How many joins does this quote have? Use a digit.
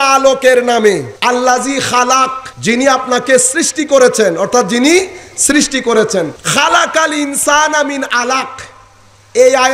3